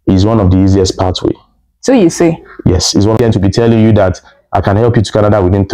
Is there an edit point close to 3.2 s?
yes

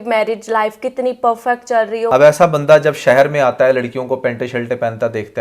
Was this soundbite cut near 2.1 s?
yes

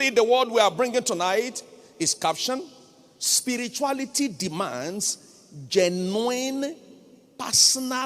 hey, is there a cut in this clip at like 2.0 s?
no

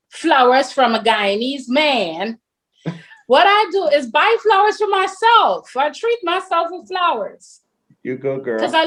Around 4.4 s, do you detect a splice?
no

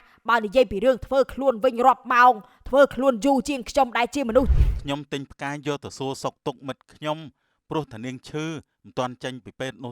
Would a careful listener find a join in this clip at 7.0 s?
no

